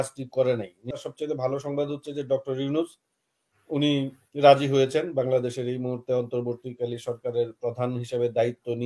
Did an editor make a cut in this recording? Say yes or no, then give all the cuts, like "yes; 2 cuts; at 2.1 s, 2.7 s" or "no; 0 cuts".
yes; 1 cut; at 1.0 s